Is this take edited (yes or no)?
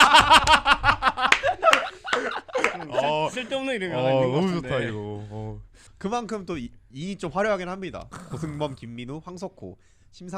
no